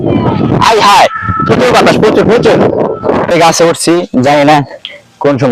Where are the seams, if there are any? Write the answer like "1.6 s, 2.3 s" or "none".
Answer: 3.3 s